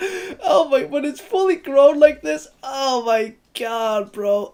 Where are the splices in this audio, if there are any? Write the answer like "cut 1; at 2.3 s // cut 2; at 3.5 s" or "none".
none